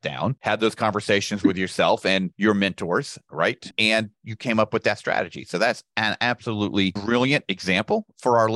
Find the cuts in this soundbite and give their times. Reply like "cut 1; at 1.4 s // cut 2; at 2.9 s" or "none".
cut 1; at 2.3 s // cut 2; at 7.0 s